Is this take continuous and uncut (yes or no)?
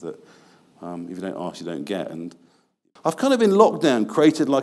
no